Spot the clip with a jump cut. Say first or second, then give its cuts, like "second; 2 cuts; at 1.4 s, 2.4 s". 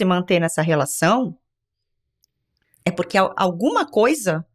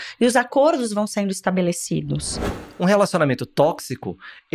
second; 1 cut; at 2.5 s